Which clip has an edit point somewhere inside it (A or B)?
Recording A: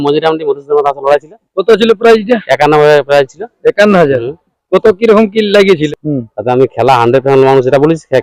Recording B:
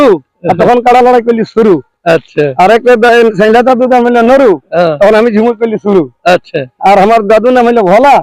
A